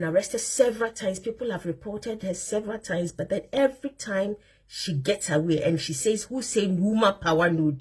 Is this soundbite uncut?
yes; 0 cuts

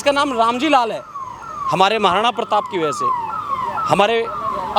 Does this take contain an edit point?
no; 0 cuts

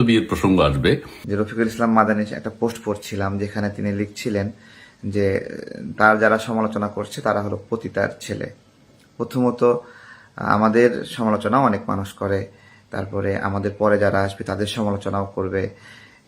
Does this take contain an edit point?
yes; 1 cut; at 1.2 s

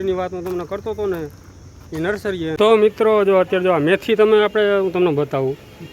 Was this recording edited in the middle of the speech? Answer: yes; 1 cut; at 2.6 s

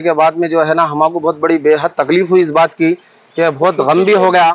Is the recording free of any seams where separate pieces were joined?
yes; 0 cuts

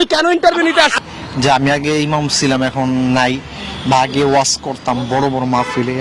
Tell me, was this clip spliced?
yes; 1 cut; at 1.0 s

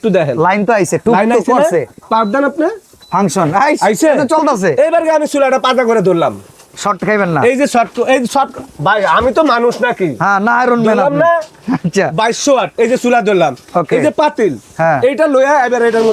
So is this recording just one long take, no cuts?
yes; 0 cuts

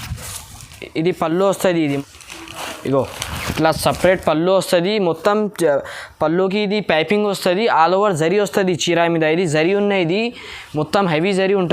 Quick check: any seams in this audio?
yes; 1 cut; at 2.0 s

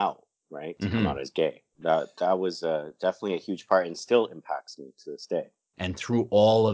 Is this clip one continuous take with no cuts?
no; 2 cuts; at 1.7 s, 5.6 s

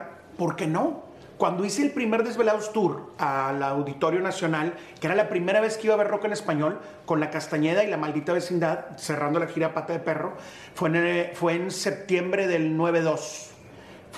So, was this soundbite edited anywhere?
no; 0 cuts

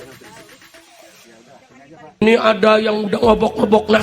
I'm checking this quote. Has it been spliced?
yes; 1 cut; at 2.2 s

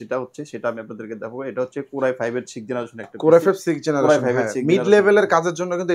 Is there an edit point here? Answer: no; 0 cuts

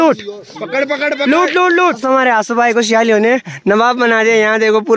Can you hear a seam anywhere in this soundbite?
yes; 1 cut; at 2.0 s

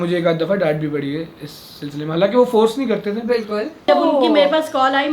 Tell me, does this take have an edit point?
yes; 1 cut; at 3.9 s

